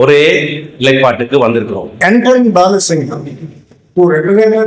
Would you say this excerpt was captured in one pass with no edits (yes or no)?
no